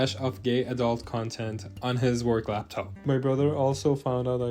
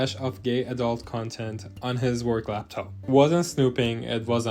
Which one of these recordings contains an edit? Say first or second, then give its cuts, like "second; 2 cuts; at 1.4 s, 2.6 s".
first; 1 cut; at 2.9 s